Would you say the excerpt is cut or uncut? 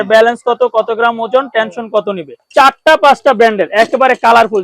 cut